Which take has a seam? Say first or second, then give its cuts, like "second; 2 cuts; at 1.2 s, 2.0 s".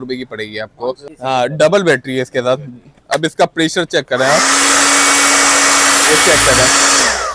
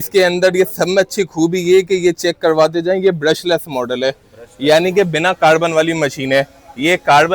first; 1 cut; at 1.1 s